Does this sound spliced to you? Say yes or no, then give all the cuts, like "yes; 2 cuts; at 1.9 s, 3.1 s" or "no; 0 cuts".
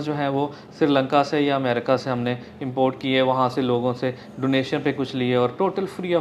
no; 0 cuts